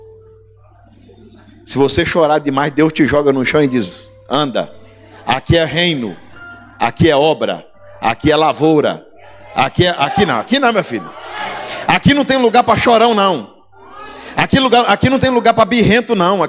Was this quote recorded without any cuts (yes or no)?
yes